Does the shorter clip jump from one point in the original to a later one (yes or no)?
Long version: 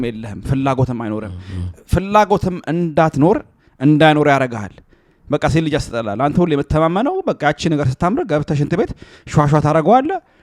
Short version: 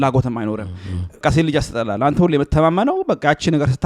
yes